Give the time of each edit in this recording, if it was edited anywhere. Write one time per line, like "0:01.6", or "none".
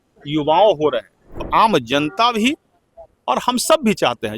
0:01.4